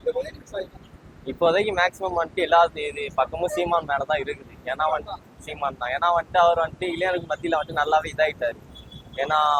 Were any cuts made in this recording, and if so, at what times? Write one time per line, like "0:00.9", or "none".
none